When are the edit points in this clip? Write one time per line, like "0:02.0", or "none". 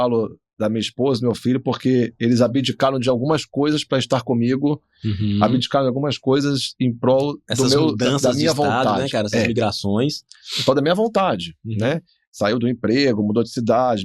none